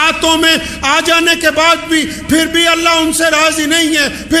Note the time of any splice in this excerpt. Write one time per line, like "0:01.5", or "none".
none